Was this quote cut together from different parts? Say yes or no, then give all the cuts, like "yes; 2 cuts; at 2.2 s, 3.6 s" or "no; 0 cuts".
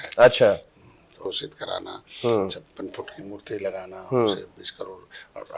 yes; 1 cut; at 1.2 s